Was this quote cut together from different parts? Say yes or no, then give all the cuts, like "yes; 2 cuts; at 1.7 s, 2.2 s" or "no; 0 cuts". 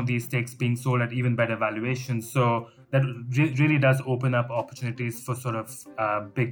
no; 0 cuts